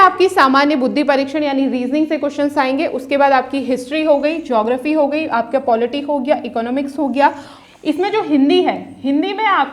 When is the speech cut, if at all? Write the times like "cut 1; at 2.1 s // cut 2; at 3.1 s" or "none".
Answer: cut 1; at 7.5 s

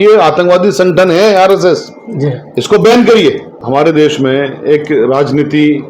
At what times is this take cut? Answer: cut 1; at 3.5 s

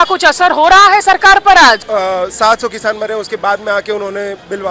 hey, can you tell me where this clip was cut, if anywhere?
cut 1; at 1.8 s

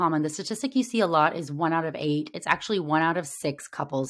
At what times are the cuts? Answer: none

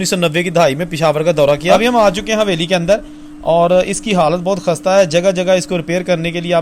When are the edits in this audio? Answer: cut 1; at 1.8 s

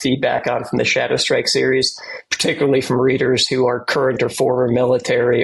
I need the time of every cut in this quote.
none

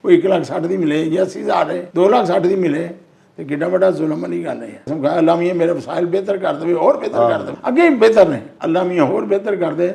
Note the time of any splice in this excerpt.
cut 1; at 1.8 s // cut 2; at 4.9 s // cut 3; at 7.5 s // cut 4; at 8.5 s

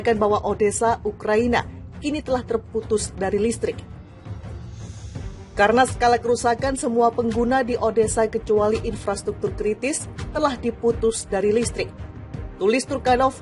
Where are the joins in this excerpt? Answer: cut 1; at 3.7 s // cut 2; at 5.5 s

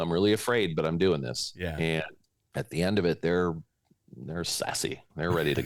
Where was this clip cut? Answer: none

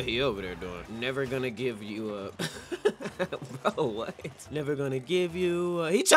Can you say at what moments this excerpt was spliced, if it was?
cut 1; at 0.8 s // cut 2; at 2.3 s

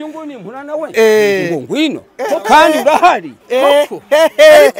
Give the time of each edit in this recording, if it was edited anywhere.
none

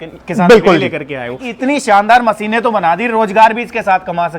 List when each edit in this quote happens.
cut 1; at 1.5 s

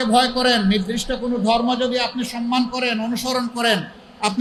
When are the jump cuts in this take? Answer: none

